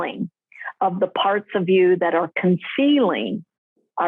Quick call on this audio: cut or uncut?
uncut